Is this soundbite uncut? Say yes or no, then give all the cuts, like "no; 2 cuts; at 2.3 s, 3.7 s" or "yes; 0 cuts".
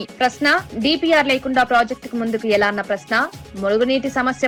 yes; 0 cuts